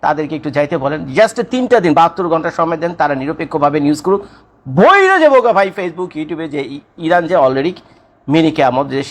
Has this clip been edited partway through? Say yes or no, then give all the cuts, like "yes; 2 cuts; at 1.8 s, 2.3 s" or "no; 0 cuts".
no; 0 cuts